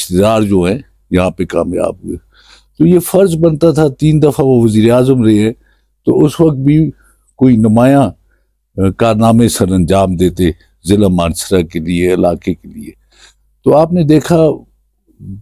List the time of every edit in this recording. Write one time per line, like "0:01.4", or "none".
none